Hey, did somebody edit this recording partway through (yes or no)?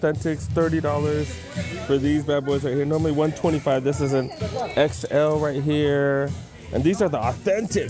no